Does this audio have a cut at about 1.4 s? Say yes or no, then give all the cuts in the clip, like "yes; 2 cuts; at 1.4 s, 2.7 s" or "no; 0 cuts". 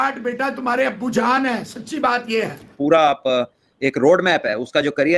no; 1 cut; at 2.7 s